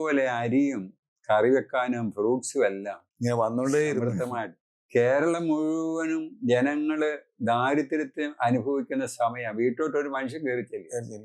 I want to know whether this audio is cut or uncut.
uncut